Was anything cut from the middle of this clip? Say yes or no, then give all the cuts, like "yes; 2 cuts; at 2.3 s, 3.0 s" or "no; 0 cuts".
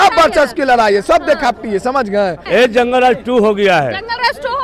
yes; 1 cut; at 2.4 s